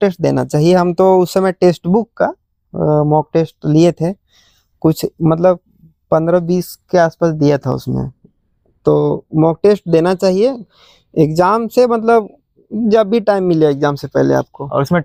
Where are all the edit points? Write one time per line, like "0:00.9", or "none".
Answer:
none